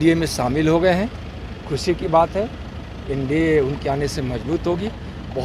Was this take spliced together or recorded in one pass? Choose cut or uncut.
uncut